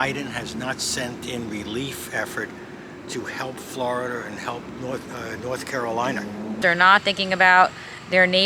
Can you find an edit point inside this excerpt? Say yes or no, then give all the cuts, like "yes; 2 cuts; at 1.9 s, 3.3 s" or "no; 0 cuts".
yes; 1 cut; at 6.6 s